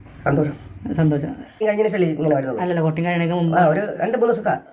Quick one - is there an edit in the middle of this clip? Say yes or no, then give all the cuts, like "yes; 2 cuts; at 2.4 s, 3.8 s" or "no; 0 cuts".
yes; 1 cut; at 1.6 s